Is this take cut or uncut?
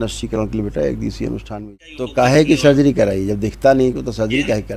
cut